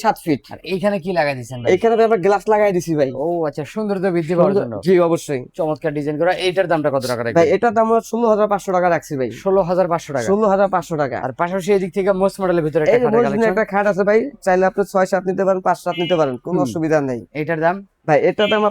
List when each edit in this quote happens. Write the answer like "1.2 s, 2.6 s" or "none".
none